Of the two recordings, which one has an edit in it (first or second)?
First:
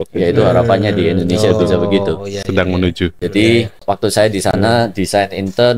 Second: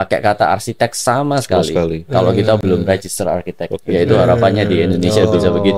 first